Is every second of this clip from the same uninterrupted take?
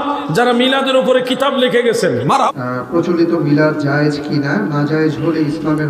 no; 1 cut; at 2.5 s

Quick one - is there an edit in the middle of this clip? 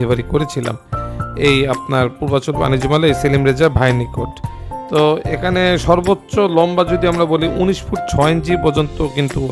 no; 0 cuts

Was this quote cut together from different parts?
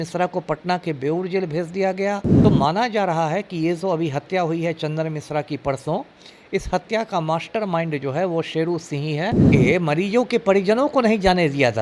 yes; 2 cuts; at 2.3 s, 9.4 s

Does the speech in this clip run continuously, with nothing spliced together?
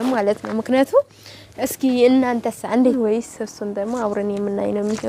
no; 1 cut; at 2.9 s

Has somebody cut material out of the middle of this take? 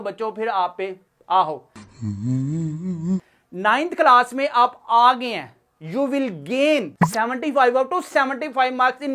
no; 0 cuts

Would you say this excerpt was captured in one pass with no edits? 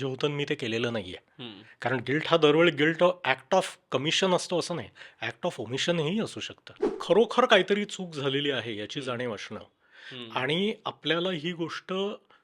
no; 1 cut; at 6.9 s

